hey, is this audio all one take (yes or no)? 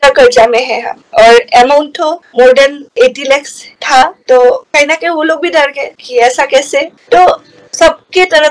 no